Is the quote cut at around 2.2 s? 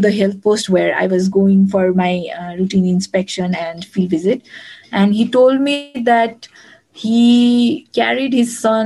no; 0 cuts

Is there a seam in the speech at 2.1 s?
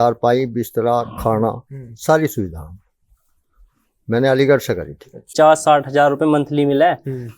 no; 1 cut; at 5.3 s

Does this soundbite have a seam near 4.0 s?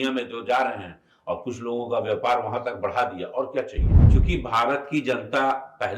yes; 1 cut; at 4.0 s

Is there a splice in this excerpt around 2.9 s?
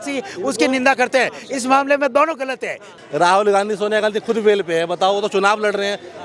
yes; 1 cut; at 2.9 s

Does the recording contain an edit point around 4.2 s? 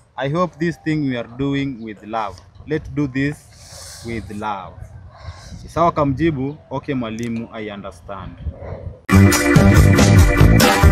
no; 1 cut; at 8.9 s

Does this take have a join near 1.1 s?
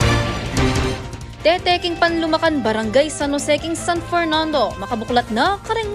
yes; 1 cut; at 1.1 s

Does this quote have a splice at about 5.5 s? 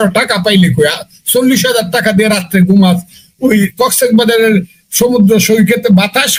no; 0 cuts

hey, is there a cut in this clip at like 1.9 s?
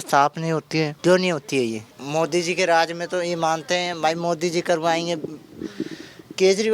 yes; 2 cuts; at 0.9 s, 1.9 s

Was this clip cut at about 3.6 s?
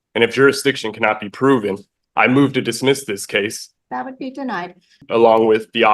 yes; 2 cuts; at 3.6 s, 5.0 s

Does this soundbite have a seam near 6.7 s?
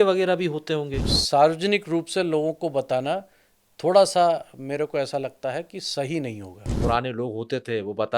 yes; 2 cuts; at 1.0 s, 6.7 s

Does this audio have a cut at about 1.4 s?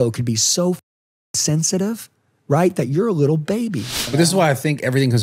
no; 1 cut; at 4.0 s

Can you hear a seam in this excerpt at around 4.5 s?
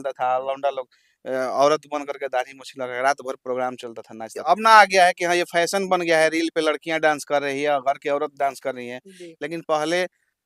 yes; 1 cut; at 4.5 s

